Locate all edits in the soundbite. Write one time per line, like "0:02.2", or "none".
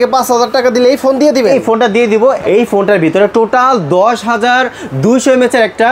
0:02.4